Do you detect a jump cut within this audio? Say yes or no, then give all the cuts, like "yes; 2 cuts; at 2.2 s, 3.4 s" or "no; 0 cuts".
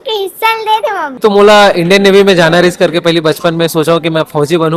yes; 1 cut; at 1.2 s